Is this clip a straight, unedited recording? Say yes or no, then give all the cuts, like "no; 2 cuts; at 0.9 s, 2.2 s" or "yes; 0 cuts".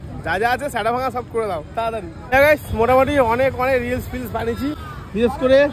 no; 1 cut; at 2.1 s